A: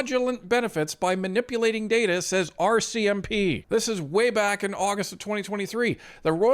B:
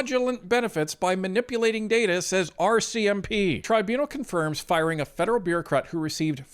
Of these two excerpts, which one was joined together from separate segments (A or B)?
B